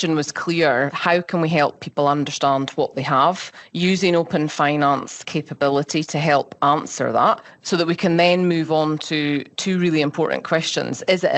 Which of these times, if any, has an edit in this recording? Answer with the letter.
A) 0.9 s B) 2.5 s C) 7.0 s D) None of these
A